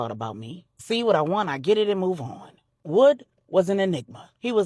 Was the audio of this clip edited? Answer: no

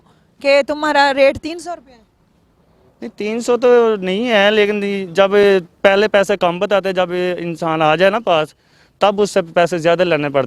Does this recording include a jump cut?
no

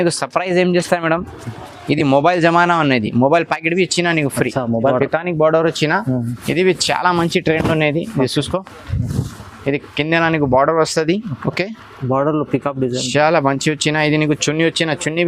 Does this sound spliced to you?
yes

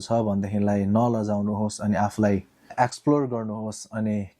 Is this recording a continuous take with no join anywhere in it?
no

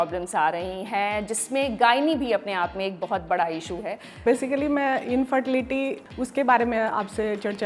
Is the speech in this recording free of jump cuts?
no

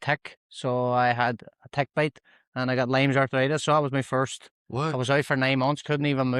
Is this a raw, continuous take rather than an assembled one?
yes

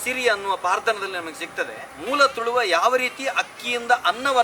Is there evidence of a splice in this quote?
yes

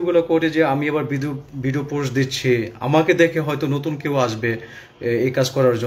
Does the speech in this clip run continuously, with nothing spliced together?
yes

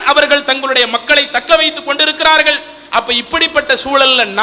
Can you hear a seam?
no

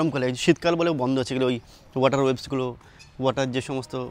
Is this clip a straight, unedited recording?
yes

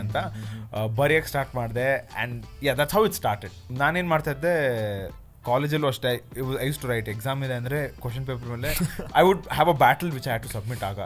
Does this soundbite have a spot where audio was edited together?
yes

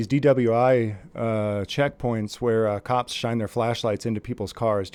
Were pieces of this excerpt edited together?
no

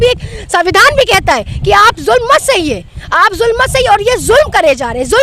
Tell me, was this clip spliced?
no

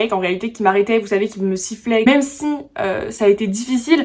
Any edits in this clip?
yes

